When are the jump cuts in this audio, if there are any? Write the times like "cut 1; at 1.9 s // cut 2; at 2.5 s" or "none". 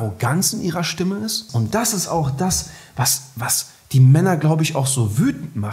cut 1; at 1.4 s